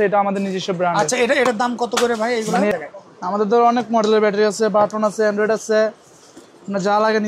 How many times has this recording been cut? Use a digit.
1